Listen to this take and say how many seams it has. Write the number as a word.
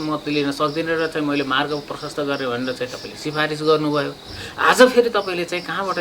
zero